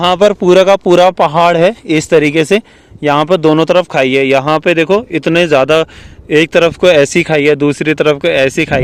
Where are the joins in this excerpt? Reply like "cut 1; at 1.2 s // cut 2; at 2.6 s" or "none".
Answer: none